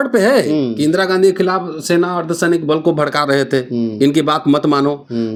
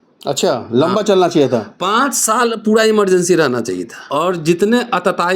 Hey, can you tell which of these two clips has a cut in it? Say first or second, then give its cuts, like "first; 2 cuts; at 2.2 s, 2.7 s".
second; 1 cut; at 3.9 s